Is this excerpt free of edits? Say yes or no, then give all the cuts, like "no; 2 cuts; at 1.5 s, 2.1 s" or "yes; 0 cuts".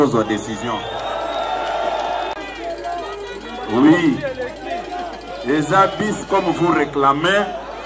yes; 0 cuts